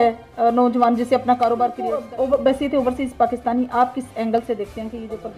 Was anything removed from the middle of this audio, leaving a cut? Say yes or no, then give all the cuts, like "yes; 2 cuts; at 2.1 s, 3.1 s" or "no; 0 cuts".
yes; 1 cut; at 2.0 s